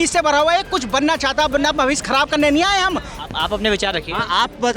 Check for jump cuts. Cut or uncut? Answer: cut